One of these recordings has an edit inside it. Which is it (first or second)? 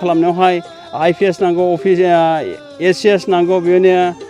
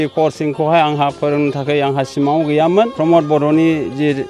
second